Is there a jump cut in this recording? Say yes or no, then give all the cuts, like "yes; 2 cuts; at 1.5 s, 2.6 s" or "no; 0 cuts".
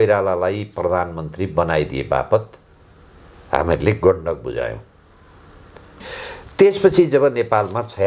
yes; 1 cut; at 6.0 s